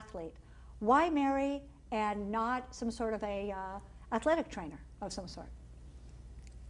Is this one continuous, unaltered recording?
no; 1 cut; at 4.7 s

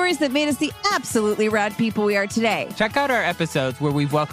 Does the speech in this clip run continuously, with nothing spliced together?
no; 1 cut; at 2.7 s

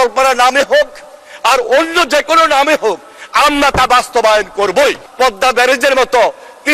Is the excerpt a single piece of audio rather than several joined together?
no; 1 cut; at 5.1 s

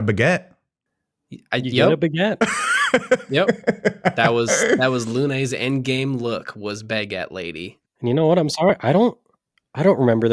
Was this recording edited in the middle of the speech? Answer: yes; 1 cut; at 8.0 s

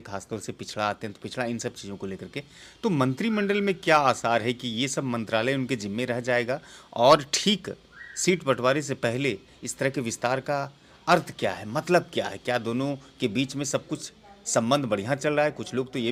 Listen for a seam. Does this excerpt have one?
no; 0 cuts

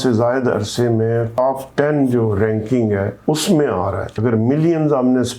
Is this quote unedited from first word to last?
no; 3 cuts; at 1.3 s, 3.1 s, 4.2 s

